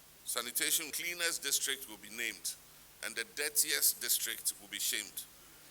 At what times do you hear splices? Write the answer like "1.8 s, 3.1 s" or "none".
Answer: 0.9 s